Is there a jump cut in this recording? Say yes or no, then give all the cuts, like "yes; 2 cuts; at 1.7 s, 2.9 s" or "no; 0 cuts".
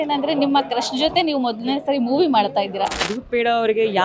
yes; 1 cut; at 3.0 s